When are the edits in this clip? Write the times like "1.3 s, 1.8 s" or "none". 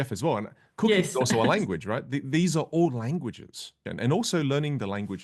3.9 s